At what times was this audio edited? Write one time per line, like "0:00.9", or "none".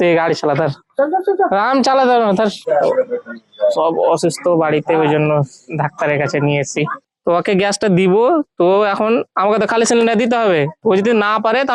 0:02.6
0:07.0